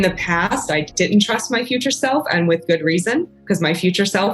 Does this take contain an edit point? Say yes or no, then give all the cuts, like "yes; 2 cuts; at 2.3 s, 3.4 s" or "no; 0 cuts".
yes; 2 cuts; at 0.9 s, 3.3 s